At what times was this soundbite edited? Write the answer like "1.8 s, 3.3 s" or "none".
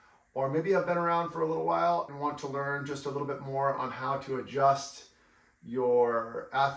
2.1 s